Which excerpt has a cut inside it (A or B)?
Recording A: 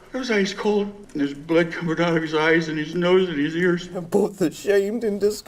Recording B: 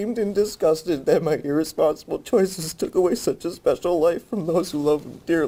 A